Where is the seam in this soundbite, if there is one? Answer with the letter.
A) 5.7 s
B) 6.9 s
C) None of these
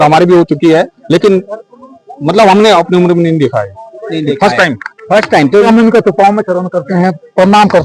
A